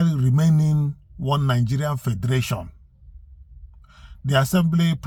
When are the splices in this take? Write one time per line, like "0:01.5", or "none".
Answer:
none